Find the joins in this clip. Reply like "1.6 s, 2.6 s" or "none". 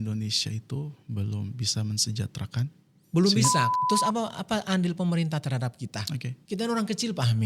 3.7 s, 6.3 s